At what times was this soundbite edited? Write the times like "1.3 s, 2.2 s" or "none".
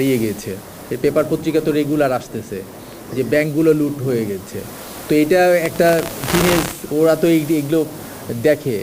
none